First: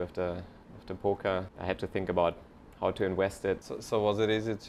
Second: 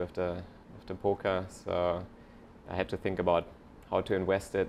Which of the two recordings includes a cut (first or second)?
first